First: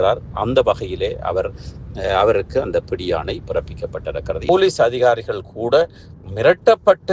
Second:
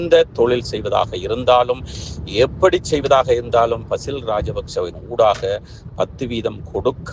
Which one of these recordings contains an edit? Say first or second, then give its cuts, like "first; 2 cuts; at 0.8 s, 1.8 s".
first; 1 cut; at 4.5 s